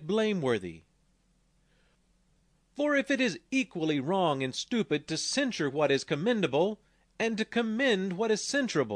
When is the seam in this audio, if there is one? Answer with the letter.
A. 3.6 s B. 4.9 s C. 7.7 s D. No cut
B